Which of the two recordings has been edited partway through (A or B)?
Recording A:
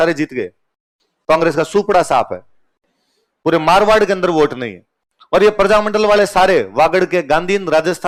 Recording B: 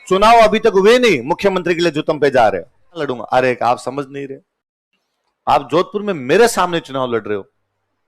B